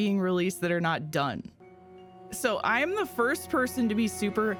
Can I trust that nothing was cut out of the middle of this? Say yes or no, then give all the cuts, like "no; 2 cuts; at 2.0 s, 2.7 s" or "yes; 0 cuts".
yes; 0 cuts